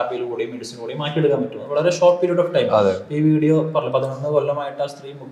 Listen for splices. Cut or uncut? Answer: uncut